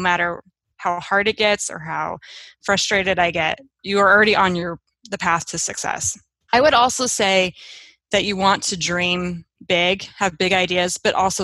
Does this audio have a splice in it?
no; 0 cuts

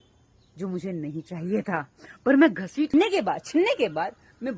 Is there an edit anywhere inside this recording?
yes; 1 cut; at 2.9 s

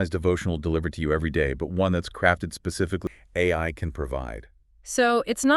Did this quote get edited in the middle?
yes; 1 cut; at 3.0 s

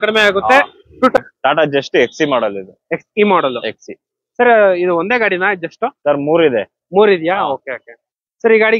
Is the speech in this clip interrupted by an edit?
yes; 1 cut; at 1.2 s

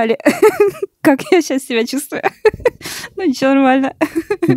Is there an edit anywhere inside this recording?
no; 0 cuts

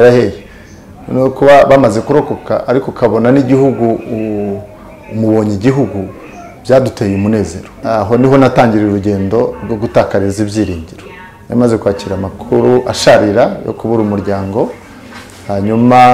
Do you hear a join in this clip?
yes; 1 cut; at 7.7 s

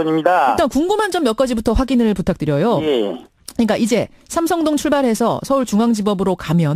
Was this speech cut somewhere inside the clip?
no; 0 cuts

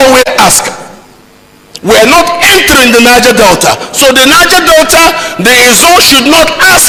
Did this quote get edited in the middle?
no; 0 cuts

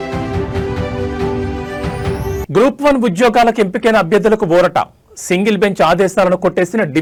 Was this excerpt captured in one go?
yes; 0 cuts

